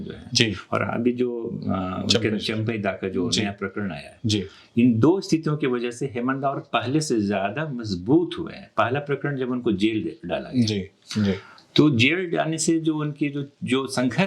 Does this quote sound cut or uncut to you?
uncut